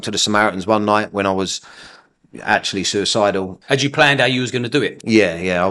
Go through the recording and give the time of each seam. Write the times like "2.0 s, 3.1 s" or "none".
3.5 s